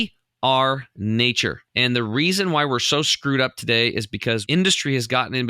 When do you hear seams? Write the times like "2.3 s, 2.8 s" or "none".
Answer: 1.7 s, 4.4 s